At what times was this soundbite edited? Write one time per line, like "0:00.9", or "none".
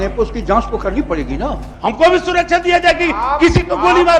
0:01.7